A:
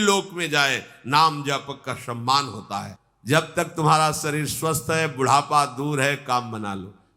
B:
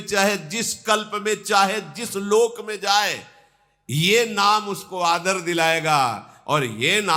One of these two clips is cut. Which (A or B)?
A